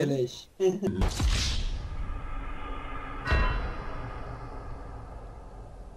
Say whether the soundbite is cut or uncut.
cut